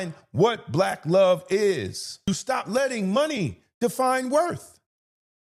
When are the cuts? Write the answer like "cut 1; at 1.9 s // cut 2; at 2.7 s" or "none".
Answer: cut 1; at 2.3 s